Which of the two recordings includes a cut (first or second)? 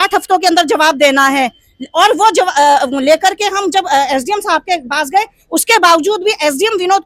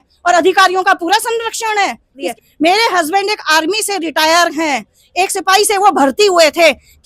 second